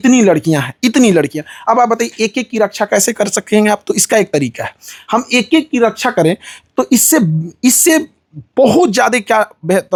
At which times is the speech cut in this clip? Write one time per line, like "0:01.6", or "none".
none

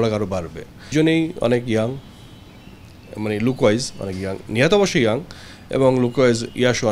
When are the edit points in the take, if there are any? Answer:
0:00.9

